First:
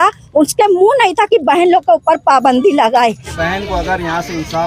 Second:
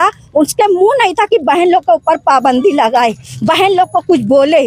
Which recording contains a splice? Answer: first; 1 cut; at 3.3 s

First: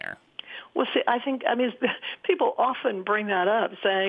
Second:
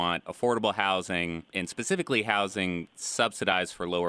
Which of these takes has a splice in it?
second; 1 cut; at 1.6 s

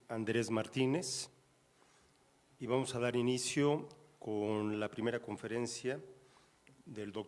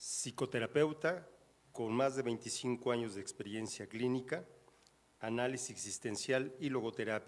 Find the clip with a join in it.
first; 1 cut; at 5.5 s

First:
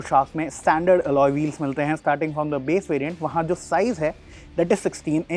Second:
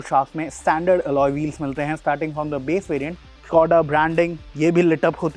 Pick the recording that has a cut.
second; 1 cut; at 3.1 s

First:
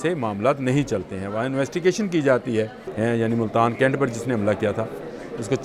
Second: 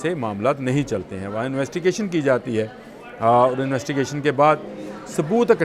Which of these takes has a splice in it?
first; 1 cut; at 2.8 s

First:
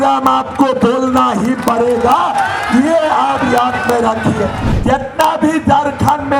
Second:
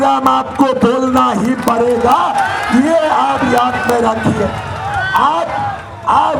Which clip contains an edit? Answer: first; 1 cut; at 4.7 s

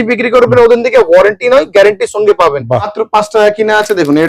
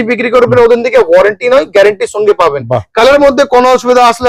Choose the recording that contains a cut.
first; 1 cut; at 2.9 s

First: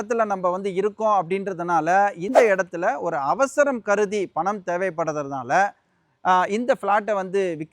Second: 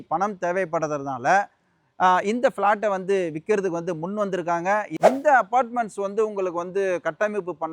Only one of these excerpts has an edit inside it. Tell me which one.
second; 1 cut; at 5.0 s

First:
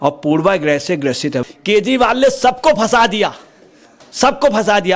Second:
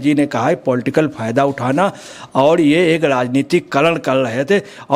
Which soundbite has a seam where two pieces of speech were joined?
first; 1 cut; at 1.4 s

